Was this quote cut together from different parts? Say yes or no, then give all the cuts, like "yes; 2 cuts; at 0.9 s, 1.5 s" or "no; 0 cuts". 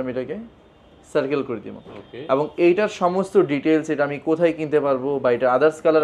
no; 0 cuts